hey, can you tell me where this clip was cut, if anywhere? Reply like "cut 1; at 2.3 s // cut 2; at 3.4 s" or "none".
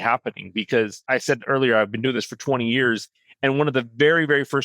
cut 1; at 1.0 s